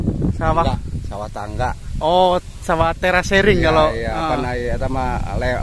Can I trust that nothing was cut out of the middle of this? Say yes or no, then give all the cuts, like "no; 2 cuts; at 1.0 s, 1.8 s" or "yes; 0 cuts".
yes; 0 cuts